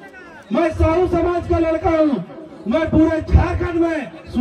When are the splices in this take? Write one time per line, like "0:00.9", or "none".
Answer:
none